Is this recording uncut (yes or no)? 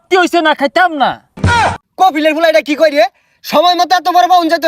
no